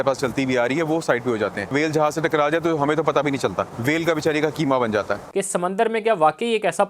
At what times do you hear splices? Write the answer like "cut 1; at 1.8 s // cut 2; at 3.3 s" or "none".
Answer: cut 1; at 1.7 s // cut 2; at 3.7 s // cut 3; at 5.2 s